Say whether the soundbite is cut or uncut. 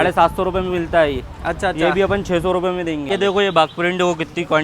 cut